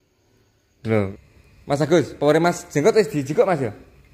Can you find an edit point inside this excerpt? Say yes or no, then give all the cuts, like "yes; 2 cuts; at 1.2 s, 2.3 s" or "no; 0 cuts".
yes; 1 cut; at 1.1 s